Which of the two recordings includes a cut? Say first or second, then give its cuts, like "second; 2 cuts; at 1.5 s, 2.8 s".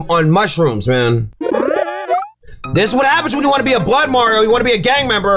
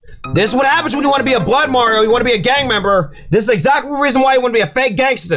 first; 1 cut; at 1.3 s